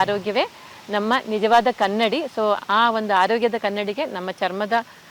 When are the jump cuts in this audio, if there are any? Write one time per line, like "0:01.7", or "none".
none

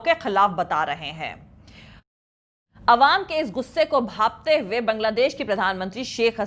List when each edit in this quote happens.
0:02.1

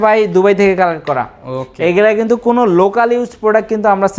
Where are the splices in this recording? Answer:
none

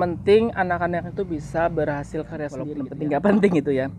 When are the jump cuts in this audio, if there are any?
0:02.8

